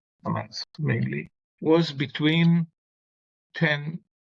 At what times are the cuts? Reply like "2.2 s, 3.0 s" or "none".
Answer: 1.4 s